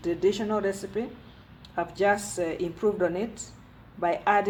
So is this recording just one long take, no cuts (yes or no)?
yes